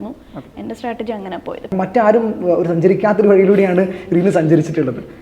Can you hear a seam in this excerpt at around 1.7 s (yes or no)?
yes